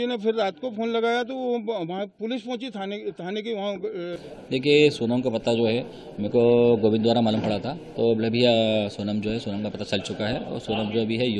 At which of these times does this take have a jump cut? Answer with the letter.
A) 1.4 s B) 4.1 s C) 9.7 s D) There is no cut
B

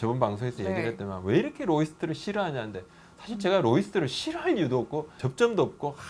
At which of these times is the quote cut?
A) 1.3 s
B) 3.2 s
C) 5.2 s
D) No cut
C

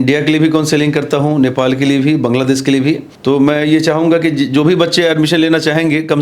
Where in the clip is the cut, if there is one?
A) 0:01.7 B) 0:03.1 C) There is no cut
B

